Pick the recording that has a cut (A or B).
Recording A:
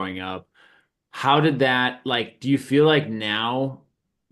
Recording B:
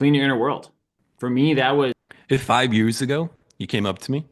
B